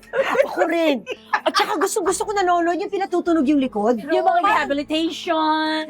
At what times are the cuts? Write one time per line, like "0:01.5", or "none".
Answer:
0:04.0